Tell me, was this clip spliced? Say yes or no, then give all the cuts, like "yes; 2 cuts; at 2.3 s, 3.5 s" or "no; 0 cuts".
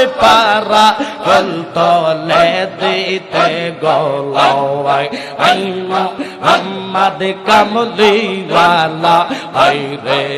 no; 0 cuts